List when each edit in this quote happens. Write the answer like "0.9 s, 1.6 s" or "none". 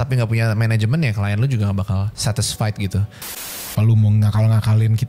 2.1 s, 3.7 s